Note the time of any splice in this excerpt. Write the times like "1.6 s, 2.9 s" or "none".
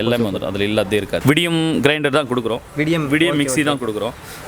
1.2 s